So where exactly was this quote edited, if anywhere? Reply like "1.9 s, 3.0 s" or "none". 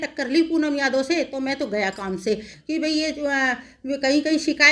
2.5 s